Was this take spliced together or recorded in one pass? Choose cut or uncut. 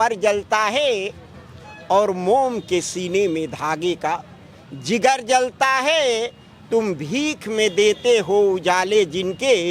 uncut